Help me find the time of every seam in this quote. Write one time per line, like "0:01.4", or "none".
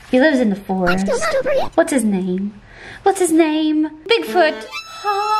0:04.0